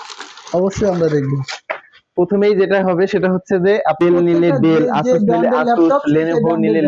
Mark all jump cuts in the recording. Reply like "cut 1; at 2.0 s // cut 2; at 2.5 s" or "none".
cut 1; at 4.0 s

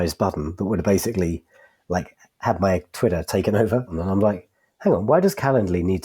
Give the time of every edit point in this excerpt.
cut 1; at 4.0 s

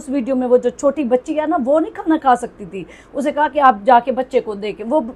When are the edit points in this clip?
none

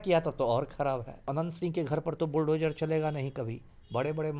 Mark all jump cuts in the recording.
cut 1; at 1.2 s

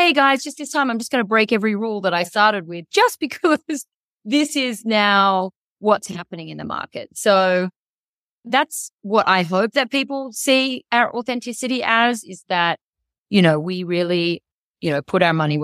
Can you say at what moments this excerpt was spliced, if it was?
cut 1; at 8.5 s

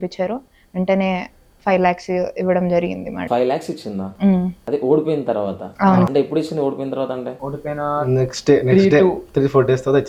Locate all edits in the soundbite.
none

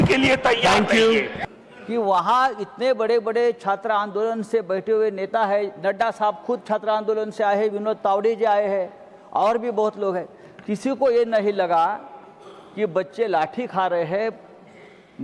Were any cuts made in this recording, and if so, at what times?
cut 1; at 1.3 s

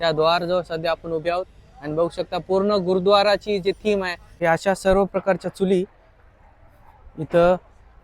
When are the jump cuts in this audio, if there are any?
cut 1; at 4.2 s

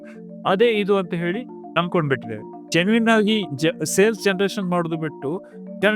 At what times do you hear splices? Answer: cut 1; at 2.6 s

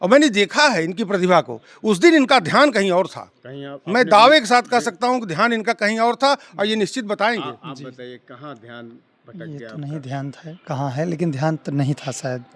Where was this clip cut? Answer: none

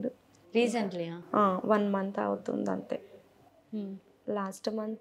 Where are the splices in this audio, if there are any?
none

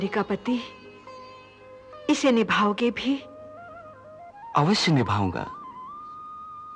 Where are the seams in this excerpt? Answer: none

